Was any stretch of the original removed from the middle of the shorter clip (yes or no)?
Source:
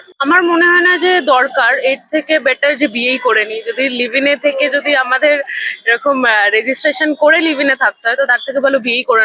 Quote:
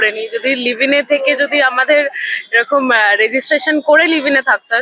no